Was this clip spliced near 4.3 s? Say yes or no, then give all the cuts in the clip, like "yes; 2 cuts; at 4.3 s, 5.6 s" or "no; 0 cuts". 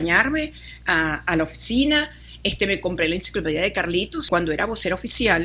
yes; 1 cut; at 4.3 s